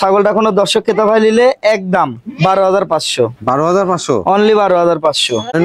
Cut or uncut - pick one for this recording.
uncut